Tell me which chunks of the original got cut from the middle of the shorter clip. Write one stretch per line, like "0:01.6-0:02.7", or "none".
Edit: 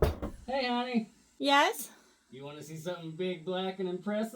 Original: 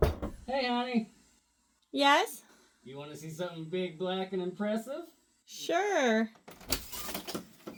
0:01.2-0:01.8